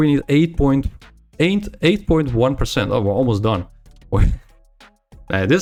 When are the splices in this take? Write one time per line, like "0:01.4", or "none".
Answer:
none